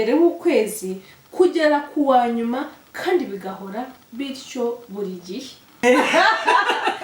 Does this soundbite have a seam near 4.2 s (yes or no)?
no